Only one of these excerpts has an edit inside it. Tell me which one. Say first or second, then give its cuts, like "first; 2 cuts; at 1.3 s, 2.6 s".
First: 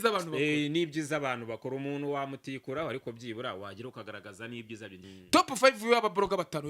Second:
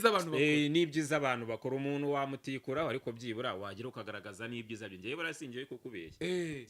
first; 1 cut; at 5.0 s